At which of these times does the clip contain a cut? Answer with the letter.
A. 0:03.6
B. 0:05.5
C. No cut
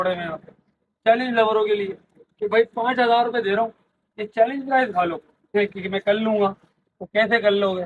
B